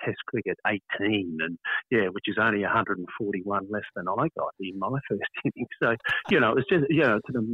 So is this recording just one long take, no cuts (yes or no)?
yes